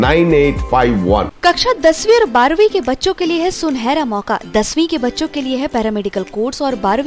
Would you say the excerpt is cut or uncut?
cut